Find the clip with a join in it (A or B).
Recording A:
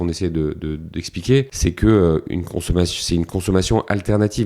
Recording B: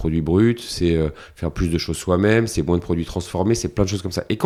A